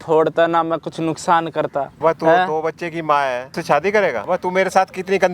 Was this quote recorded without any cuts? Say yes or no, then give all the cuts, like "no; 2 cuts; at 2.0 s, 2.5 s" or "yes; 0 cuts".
no; 3 cuts; at 1.9 s, 3.5 s, 4.2 s